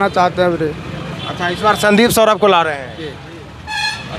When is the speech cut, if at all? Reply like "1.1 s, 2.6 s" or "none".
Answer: none